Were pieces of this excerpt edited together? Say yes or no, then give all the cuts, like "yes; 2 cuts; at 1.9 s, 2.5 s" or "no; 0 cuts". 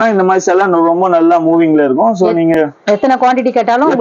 no; 0 cuts